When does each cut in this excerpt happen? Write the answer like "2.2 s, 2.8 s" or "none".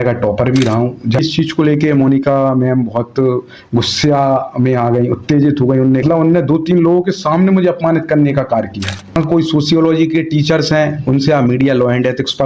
1.2 s, 6.0 s, 9.2 s

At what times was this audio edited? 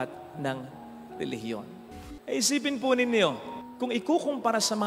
1.9 s

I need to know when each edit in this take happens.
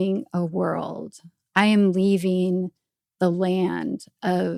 none

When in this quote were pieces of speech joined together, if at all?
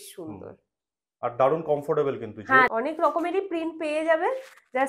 2.7 s

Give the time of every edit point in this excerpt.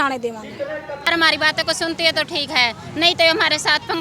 1.1 s

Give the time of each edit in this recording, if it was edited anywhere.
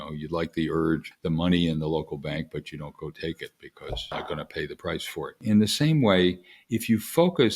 1.1 s, 4.2 s, 5.4 s

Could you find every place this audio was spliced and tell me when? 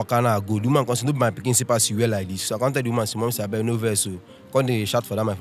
none

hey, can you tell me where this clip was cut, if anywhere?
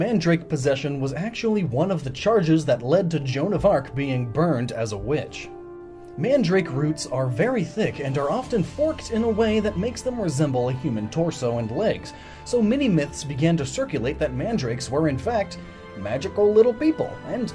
9.3 s

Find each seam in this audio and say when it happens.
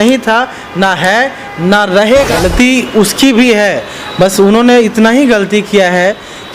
2.3 s

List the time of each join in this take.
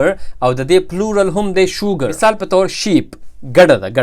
2.1 s

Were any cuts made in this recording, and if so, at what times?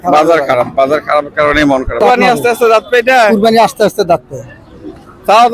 2.0 s

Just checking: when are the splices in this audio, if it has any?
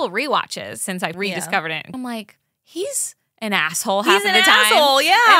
0.8 s, 1.9 s

